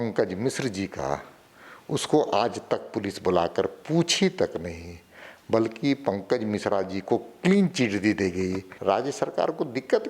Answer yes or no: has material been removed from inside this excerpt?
yes